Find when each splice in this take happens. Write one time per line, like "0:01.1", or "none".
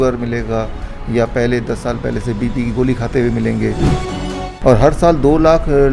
0:04.2